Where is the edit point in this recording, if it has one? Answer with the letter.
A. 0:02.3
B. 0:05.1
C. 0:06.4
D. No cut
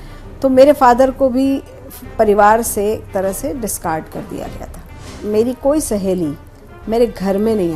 B